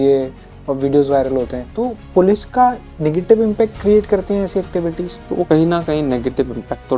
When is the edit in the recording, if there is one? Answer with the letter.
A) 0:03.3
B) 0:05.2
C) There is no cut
B